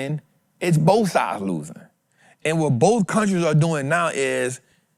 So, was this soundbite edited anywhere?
no; 0 cuts

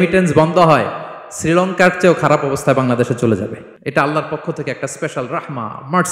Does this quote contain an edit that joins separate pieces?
yes; 1 cut; at 3.7 s

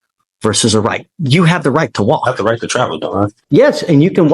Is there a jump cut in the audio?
yes; 1 cut; at 3.4 s

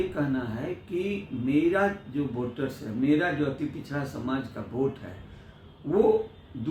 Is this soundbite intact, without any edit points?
yes; 0 cuts

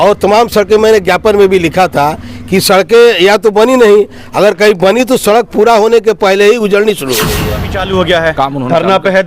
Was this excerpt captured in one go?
no; 1 cut; at 7.8 s

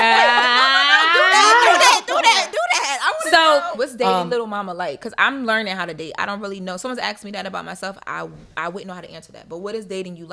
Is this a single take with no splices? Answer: no; 1 cut; at 3.7 s

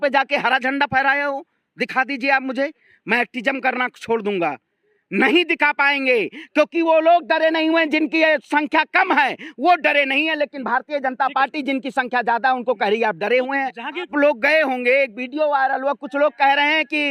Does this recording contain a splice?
yes; 1 cut; at 14.1 s

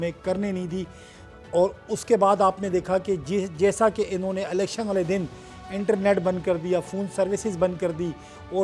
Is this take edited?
no; 0 cuts

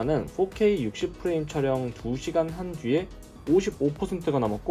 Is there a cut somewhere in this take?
no; 0 cuts

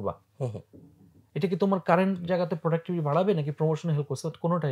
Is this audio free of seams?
yes; 0 cuts

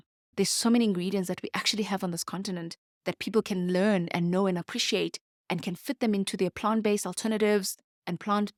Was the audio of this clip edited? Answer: no; 0 cuts

